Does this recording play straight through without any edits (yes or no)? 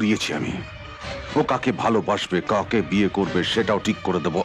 yes